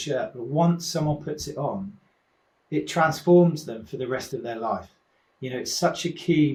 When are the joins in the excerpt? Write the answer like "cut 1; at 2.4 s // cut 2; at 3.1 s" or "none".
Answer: none